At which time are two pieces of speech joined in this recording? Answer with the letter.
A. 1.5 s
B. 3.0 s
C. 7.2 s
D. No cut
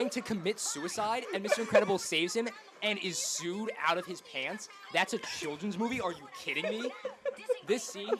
D